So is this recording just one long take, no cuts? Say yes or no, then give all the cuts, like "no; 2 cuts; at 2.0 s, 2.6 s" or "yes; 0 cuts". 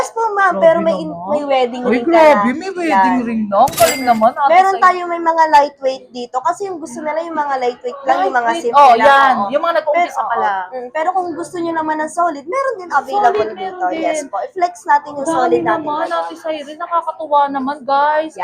yes; 0 cuts